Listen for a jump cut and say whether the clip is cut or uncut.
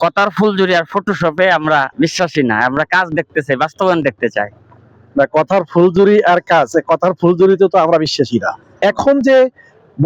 cut